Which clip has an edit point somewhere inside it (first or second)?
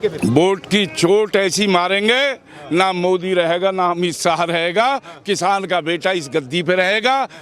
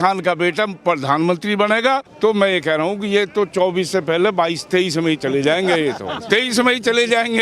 second